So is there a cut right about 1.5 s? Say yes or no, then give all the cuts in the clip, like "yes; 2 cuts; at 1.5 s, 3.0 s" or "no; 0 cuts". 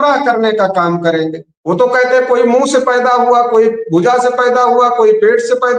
yes; 1 cut; at 1.5 s